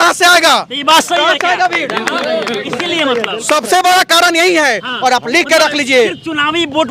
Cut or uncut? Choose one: uncut